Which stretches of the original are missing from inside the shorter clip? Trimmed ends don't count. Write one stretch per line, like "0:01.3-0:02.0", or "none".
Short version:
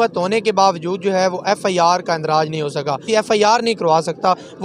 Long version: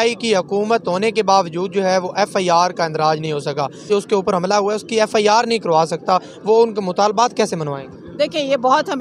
0:03.7-0:04.9